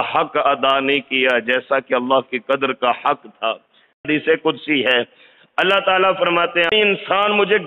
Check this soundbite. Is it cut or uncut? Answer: cut